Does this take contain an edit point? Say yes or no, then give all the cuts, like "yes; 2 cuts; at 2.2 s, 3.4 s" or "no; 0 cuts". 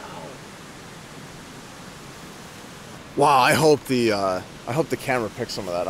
yes; 1 cut; at 3.2 s